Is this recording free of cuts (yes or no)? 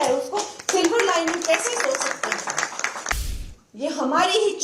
no